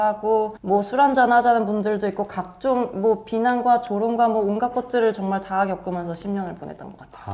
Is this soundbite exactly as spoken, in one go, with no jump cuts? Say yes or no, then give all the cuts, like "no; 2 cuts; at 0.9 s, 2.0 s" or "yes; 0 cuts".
yes; 0 cuts